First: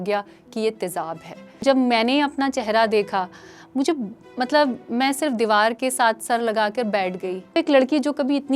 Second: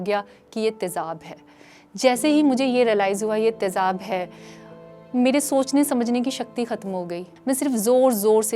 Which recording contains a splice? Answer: first; 2 cuts; at 1.5 s, 7.4 s

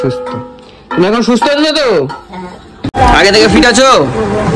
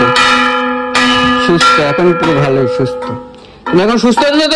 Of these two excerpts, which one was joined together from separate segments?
first; 1 cut; at 2.9 s

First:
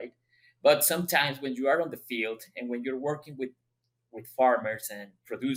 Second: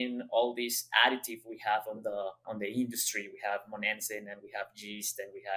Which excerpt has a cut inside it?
second; 1 cut; at 2.5 s

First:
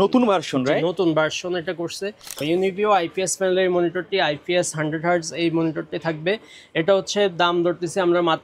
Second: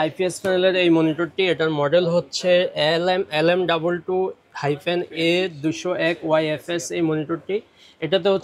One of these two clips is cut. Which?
first; 1 cut; at 2.4 s

